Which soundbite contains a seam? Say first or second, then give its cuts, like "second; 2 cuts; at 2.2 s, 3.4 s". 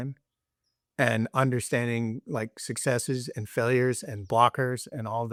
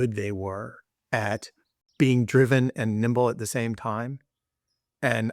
second; 1 cut; at 1.8 s